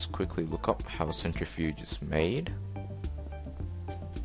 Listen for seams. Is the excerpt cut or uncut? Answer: uncut